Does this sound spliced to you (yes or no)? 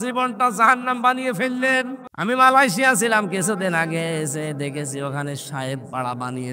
yes